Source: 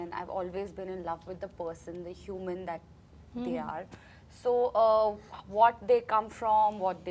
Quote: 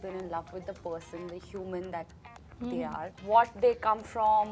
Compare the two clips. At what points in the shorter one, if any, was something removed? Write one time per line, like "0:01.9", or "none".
0:03.1